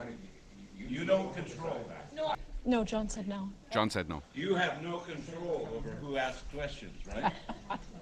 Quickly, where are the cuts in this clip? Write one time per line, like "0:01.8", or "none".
0:02.3